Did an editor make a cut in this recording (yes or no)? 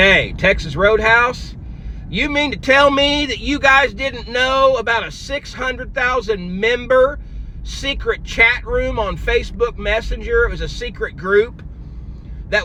no